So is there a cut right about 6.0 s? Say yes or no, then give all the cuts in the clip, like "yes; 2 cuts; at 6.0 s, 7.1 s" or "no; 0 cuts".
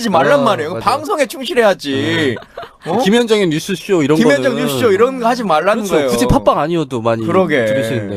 no; 1 cut; at 3.0 s